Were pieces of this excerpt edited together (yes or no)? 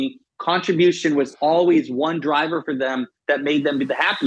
no